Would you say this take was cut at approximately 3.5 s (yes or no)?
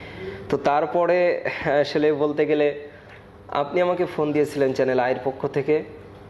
no